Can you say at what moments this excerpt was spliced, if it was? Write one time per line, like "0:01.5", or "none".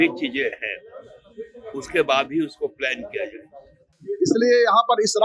0:04.0